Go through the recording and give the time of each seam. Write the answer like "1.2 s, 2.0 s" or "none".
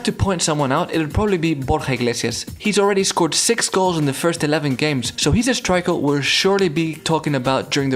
2.5 s, 5.1 s